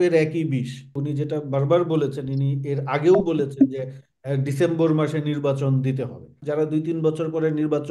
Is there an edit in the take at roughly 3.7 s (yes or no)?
no